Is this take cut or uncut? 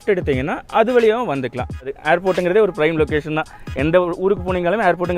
cut